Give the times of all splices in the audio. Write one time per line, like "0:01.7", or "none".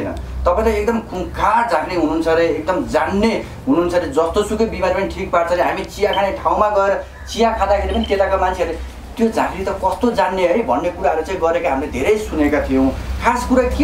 none